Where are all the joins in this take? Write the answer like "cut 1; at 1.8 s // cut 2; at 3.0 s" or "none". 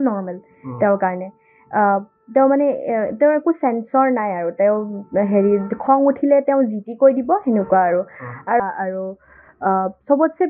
cut 1; at 8.6 s

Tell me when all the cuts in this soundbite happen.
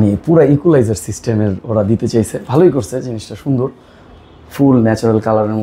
none

